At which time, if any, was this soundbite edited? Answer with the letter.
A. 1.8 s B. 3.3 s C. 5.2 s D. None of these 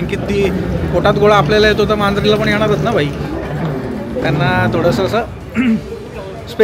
D